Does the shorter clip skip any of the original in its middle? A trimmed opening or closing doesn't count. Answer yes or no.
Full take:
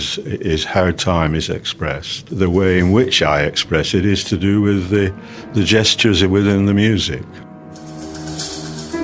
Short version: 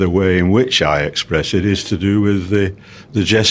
no